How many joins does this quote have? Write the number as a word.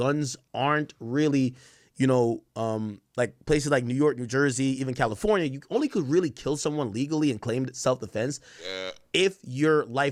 zero